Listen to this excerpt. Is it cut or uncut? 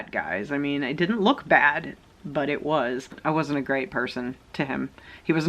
cut